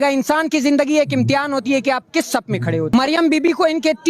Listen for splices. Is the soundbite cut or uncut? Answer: cut